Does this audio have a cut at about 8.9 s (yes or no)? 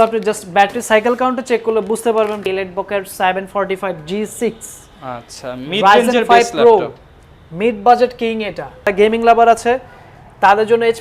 yes